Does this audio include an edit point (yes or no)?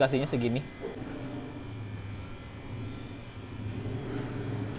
no